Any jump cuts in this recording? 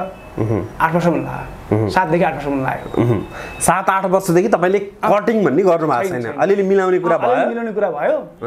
no; 0 cuts

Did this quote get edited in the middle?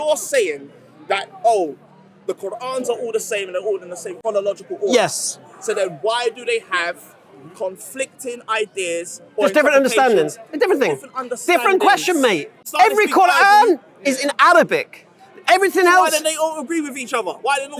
yes; 2 cuts; at 4.1 s, 12.6 s

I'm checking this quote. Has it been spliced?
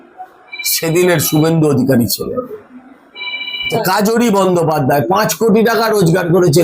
yes; 1 cut; at 3.7 s

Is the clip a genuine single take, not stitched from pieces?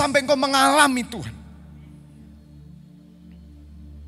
yes; 0 cuts

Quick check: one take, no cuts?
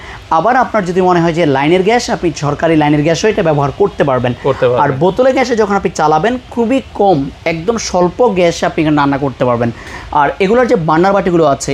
yes; 0 cuts

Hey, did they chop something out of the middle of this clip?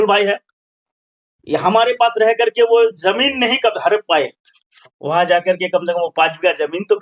no; 0 cuts

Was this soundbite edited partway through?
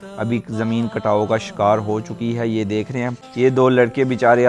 yes; 1 cut; at 3.2 s

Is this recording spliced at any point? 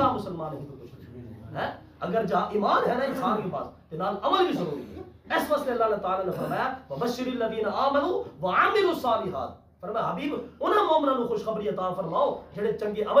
no; 0 cuts

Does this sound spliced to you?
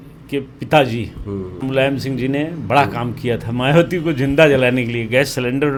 no; 0 cuts

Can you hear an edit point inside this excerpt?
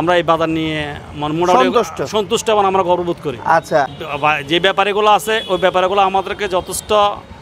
no; 0 cuts

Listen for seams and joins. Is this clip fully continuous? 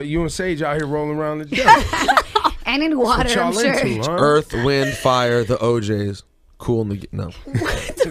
yes; 0 cuts

